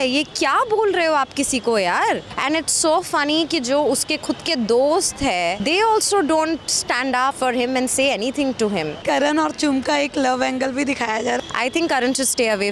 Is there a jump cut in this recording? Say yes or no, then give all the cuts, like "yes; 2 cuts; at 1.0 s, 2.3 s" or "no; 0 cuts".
yes; 5 cuts; at 2.3 s, 5.6 s, 7.4 s, 9.0 s, 11.4 s